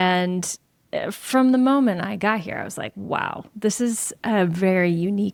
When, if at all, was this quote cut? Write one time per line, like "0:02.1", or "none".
none